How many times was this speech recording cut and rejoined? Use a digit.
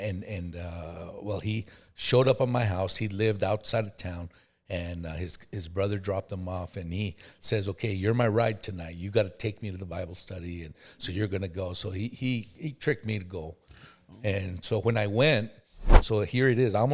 1